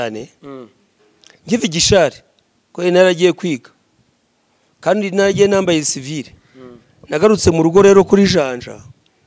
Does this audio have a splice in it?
no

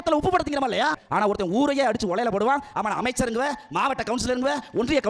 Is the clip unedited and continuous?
no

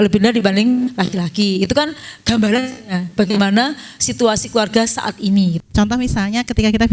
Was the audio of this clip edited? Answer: yes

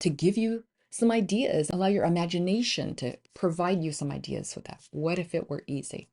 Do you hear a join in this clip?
yes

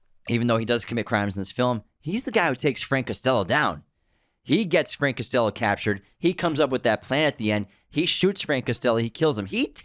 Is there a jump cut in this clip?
no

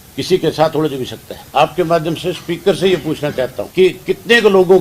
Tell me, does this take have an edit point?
yes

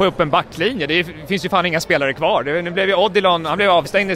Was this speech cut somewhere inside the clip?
no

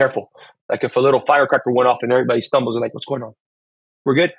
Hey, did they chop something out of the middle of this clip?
no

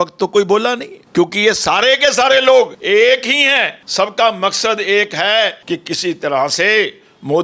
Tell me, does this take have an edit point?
yes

